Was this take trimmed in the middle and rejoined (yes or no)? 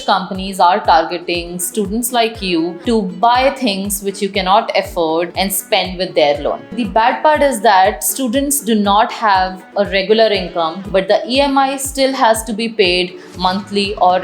yes